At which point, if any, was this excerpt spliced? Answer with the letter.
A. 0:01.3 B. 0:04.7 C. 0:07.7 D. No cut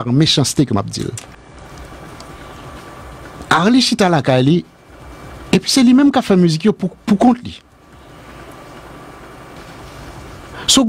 A